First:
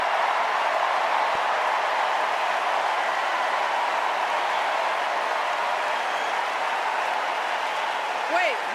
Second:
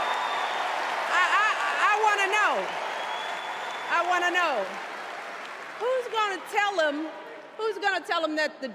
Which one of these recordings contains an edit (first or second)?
first